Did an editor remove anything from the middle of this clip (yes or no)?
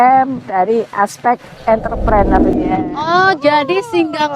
yes